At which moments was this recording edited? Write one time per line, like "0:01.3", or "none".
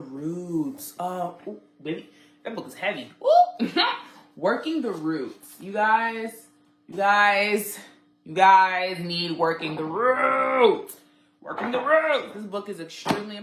none